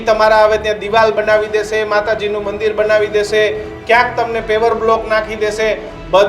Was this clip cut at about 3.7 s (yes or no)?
no